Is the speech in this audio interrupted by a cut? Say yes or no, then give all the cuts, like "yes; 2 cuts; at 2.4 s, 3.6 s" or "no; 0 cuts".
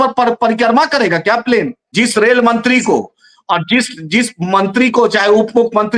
yes; 1 cut; at 1.8 s